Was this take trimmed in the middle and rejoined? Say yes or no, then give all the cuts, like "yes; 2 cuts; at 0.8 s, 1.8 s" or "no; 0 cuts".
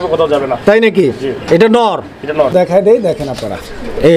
yes; 1 cut; at 2.5 s